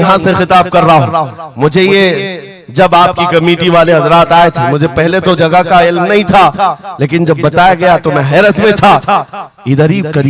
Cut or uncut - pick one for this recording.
uncut